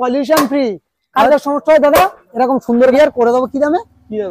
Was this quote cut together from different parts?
yes; 1 cut; at 2.9 s

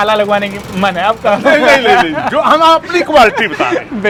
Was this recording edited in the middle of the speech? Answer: no; 0 cuts

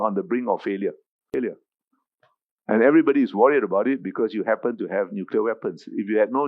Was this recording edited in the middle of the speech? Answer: yes; 1 cut; at 1.3 s

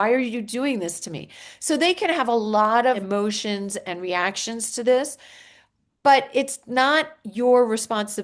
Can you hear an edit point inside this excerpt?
yes; 1 cut; at 3.0 s

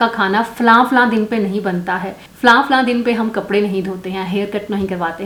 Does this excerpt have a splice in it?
no; 0 cuts

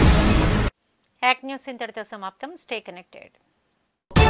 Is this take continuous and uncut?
yes; 0 cuts

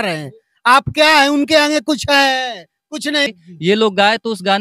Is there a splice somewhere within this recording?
yes; 1 cut; at 3.3 s

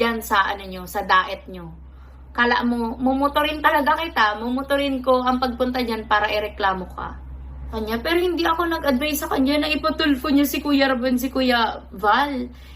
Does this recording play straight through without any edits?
no; 1 cut; at 7.7 s

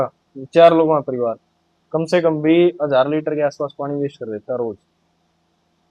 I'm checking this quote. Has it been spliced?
no; 0 cuts

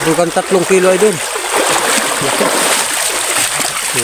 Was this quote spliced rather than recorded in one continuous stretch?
no; 0 cuts

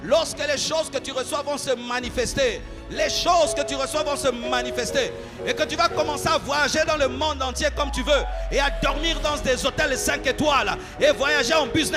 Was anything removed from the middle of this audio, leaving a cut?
no; 0 cuts

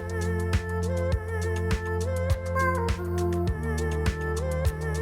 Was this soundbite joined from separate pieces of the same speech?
no; 0 cuts

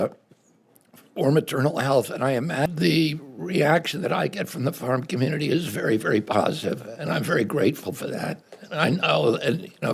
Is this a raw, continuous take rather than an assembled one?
no; 1 cut; at 2.7 s

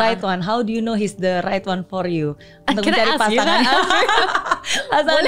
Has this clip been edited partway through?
yes; 1 cut; at 4.2 s

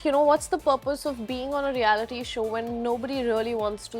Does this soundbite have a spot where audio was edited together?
no; 0 cuts

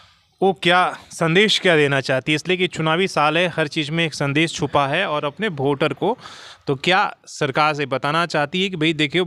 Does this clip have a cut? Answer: no; 0 cuts

